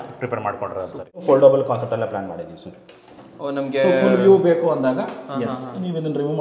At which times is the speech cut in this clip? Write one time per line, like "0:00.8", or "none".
0:01.2